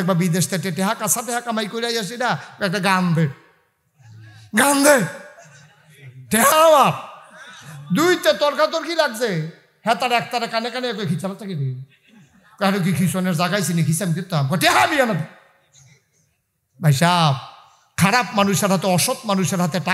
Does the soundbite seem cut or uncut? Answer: uncut